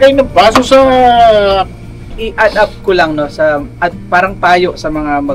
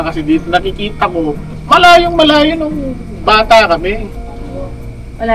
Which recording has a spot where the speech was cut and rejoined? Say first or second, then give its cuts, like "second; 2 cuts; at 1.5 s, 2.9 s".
first; 1 cut; at 2.2 s